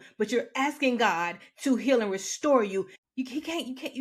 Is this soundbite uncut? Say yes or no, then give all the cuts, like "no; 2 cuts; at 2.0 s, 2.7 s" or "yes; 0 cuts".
no; 1 cut; at 3.0 s